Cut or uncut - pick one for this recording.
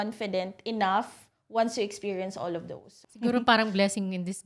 uncut